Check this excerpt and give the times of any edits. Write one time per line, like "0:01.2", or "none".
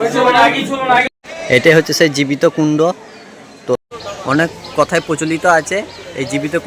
0:01.1
0:03.8